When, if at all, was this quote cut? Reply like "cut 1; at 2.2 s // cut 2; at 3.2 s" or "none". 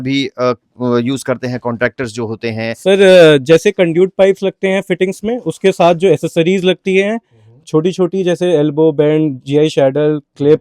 cut 1; at 2.8 s